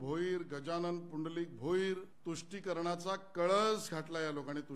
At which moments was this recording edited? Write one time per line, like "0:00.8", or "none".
0:02.1